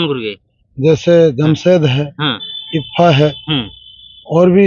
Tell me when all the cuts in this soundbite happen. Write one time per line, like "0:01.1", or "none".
none